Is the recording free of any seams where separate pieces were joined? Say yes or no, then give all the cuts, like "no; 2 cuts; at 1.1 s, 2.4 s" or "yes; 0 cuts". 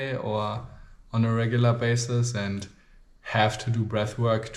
yes; 0 cuts